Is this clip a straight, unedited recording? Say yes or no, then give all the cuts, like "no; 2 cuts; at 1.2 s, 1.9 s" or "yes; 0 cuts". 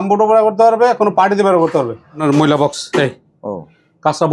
no; 1 cut; at 2.2 s